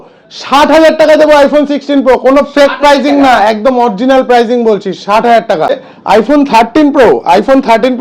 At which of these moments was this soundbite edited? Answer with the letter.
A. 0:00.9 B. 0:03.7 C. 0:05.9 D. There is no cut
C